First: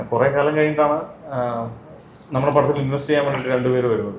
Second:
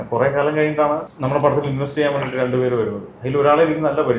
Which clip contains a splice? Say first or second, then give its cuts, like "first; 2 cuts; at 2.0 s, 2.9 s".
second; 1 cut; at 1.1 s